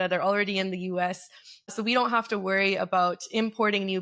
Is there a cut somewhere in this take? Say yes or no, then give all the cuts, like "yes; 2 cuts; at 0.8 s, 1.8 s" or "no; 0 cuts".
yes; 1 cut; at 1.7 s